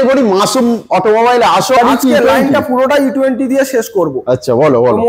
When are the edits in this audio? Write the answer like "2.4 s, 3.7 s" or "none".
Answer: 1.8 s